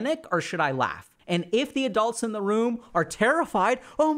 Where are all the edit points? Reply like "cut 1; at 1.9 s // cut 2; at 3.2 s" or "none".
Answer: cut 1; at 1.1 s